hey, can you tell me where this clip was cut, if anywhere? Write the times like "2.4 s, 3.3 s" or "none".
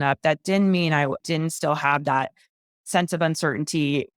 1.2 s